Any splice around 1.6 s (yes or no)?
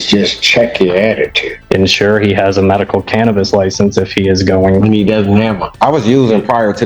yes